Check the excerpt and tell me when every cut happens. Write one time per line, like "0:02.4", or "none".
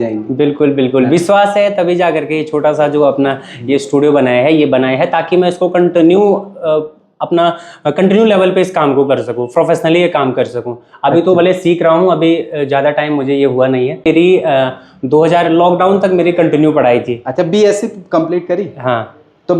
0:14.0